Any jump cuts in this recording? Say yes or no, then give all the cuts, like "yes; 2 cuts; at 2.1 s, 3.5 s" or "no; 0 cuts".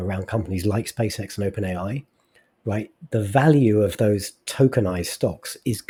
no; 0 cuts